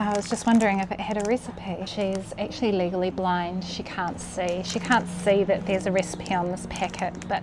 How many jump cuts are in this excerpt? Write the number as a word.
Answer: one